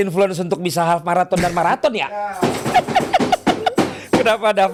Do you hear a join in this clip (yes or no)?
no